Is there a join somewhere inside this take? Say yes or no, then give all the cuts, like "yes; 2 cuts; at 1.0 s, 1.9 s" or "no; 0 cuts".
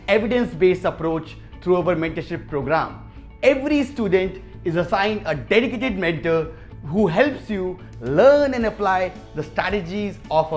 no; 0 cuts